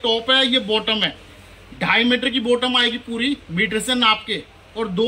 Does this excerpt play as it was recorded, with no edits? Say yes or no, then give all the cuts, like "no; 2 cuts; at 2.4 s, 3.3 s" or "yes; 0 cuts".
yes; 0 cuts